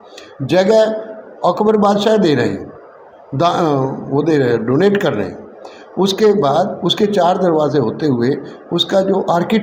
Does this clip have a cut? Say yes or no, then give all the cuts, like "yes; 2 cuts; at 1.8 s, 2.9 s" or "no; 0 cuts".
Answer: no; 0 cuts